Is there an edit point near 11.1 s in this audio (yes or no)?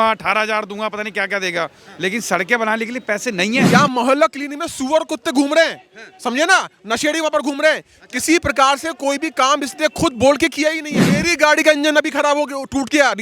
yes